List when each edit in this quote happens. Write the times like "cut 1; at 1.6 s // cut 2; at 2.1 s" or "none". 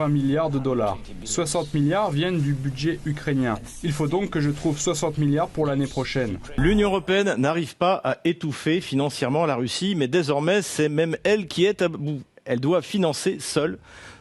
cut 1; at 6.4 s